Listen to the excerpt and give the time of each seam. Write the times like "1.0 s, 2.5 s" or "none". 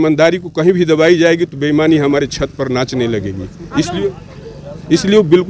none

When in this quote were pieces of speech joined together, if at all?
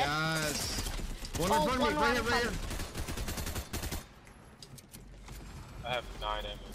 2.7 s

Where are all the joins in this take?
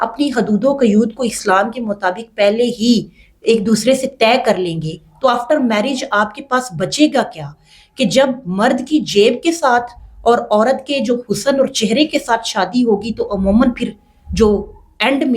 none

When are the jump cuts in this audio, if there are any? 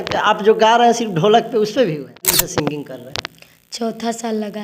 2.5 s

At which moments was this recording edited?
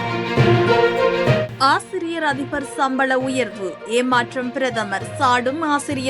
1.5 s

